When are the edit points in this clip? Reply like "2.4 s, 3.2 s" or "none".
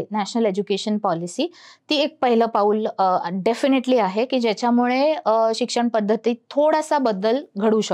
none